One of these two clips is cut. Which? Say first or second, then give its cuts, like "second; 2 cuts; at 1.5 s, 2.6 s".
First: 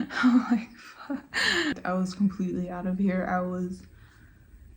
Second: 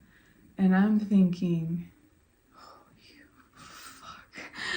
first; 1 cut; at 1.8 s